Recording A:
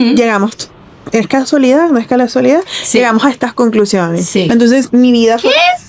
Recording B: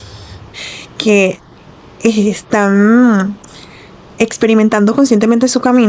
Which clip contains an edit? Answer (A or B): A